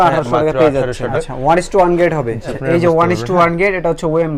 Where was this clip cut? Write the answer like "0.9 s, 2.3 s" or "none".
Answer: 1.2 s, 2.5 s